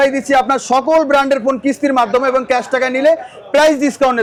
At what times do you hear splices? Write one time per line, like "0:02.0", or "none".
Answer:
none